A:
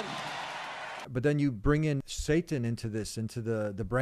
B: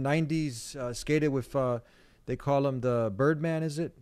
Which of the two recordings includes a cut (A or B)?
A